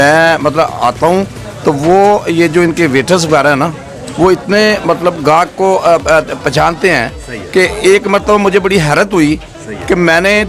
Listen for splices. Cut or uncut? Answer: uncut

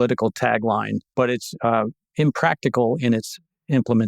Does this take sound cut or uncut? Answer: cut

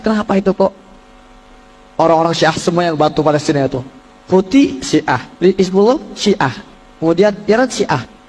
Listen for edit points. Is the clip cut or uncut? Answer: uncut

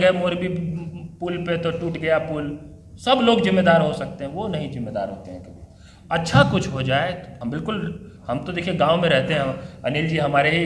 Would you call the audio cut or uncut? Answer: cut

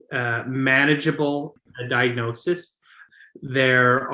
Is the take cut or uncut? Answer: cut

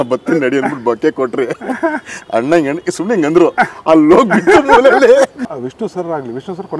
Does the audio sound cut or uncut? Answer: cut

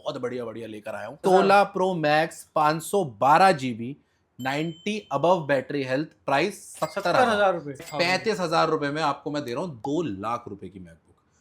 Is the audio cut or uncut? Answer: cut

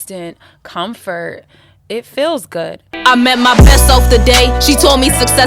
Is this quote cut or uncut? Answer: cut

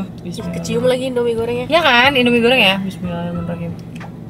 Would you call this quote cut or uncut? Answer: uncut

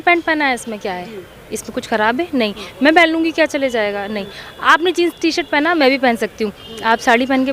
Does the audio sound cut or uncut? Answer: uncut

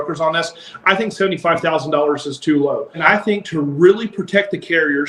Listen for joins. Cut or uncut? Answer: cut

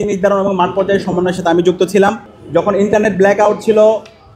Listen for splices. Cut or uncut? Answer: cut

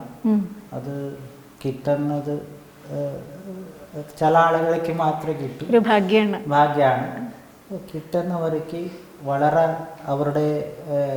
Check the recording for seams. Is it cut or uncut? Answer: uncut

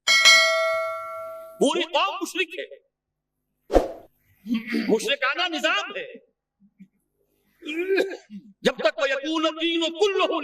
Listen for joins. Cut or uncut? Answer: cut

